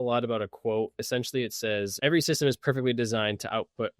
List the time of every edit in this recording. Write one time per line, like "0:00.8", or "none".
0:01.0
0:01.9

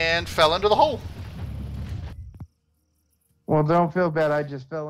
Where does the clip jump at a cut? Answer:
0:01.1

